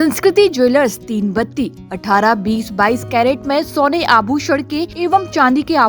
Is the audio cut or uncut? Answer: cut